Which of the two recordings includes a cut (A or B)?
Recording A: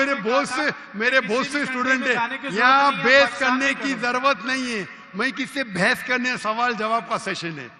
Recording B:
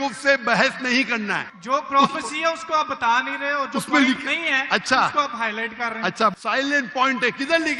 B